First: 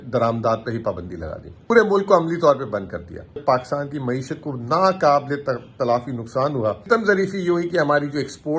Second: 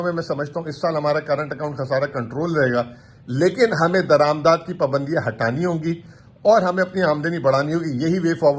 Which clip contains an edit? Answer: first; 3 cuts; at 1.7 s, 3.4 s, 6.9 s

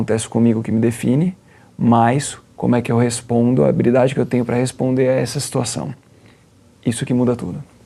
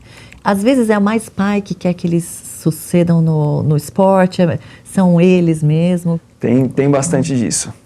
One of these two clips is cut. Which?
second; 1 cut; at 6.3 s

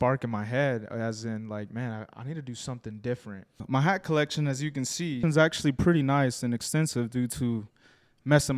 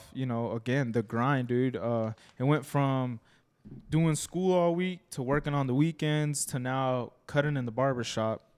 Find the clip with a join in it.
first; 2 cuts; at 3.6 s, 5.2 s

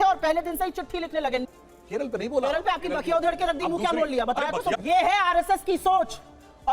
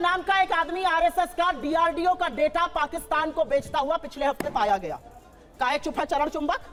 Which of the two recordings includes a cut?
first; 2 cuts; at 1.4 s, 4.8 s

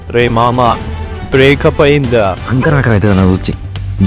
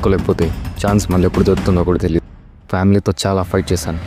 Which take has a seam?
first; 1 cut; at 2.4 s

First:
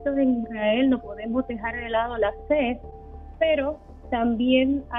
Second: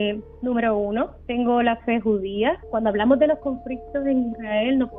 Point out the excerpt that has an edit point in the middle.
second; 2 cuts; at 1.2 s, 2.6 s

